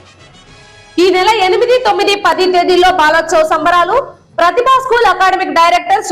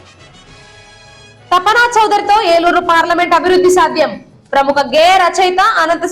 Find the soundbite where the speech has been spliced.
second; 1 cut; at 0.9 s

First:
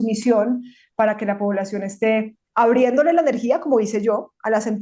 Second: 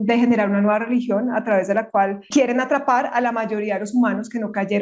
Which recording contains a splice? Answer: second; 1 cut; at 2.2 s

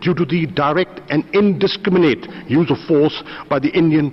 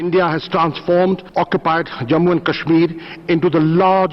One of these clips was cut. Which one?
second; 1 cut; at 1.3 s

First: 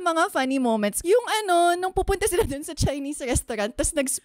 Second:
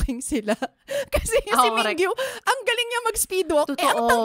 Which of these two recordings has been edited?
first; 1 cut; at 1.0 s

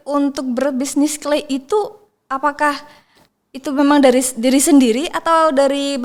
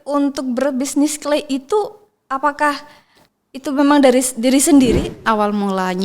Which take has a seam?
second; 1 cut; at 5.2 s

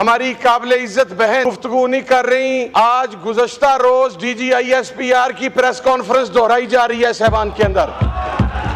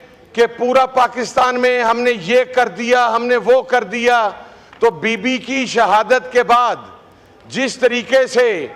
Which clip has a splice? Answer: first; 2 cuts; at 1.4 s, 2.7 s

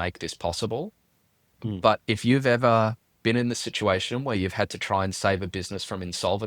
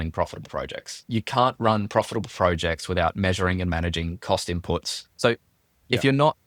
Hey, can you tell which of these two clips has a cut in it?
second; 2 cuts; at 1.1 s, 4.9 s

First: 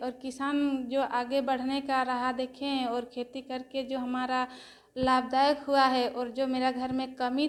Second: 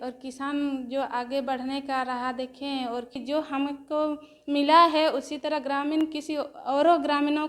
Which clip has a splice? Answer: second; 1 cut; at 3.1 s

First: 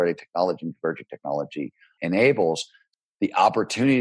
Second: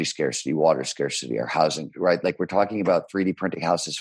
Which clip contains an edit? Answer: first; 2 cuts; at 1.8 s, 2.9 s

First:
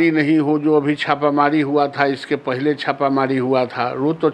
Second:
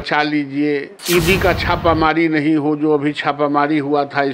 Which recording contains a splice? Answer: second; 1 cut; at 0.9 s

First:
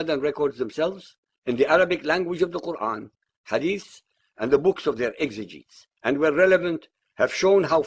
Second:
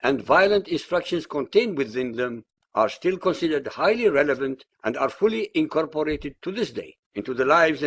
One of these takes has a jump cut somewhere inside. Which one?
second; 1 cut; at 5.4 s

